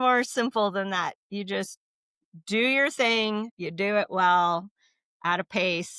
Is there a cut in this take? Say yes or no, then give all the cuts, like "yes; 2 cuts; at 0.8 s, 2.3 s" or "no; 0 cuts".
yes; 1 cut; at 3.6 s